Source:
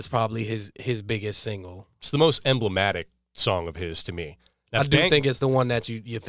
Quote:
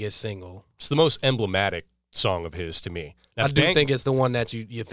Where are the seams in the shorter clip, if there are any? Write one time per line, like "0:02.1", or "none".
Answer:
0:03.2